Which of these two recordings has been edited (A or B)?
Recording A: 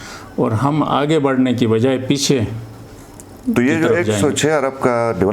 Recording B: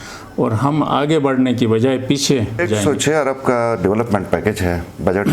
B